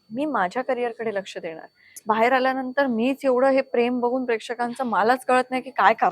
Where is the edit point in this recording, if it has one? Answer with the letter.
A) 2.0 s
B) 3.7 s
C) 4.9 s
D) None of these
A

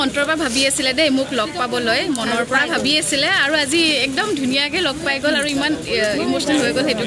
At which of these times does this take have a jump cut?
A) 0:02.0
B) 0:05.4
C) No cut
C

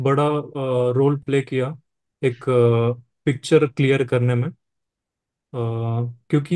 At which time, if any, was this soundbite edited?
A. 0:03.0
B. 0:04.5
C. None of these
C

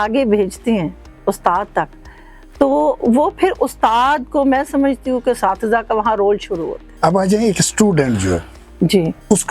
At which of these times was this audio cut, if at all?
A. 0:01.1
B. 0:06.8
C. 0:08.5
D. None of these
B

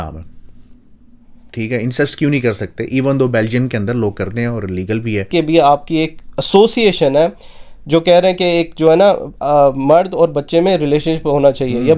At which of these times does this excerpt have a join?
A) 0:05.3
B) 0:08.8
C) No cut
A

